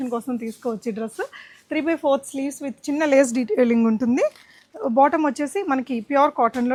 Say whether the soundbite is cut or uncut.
uncut